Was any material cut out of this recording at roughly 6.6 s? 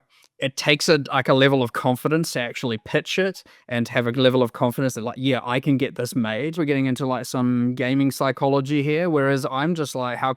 yes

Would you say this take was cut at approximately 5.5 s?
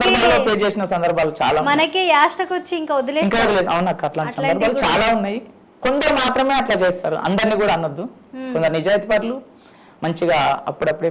no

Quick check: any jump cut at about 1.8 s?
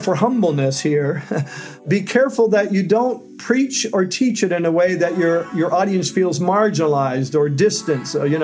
yes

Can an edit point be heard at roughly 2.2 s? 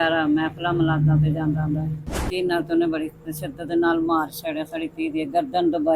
yes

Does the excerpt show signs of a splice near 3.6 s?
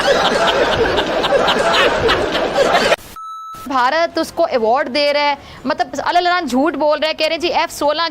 yes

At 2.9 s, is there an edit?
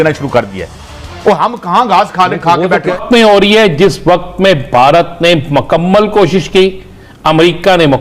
yes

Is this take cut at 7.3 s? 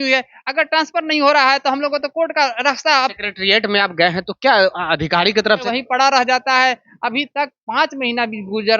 no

